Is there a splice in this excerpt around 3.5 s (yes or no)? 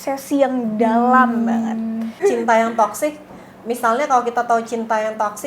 no